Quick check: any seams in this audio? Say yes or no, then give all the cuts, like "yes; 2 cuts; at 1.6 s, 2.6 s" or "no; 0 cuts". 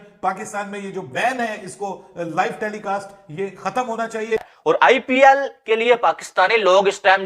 yes; 1 cut; at 4.5 s